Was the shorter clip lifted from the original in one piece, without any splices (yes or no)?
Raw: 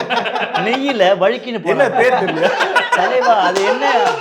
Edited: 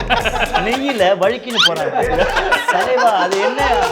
no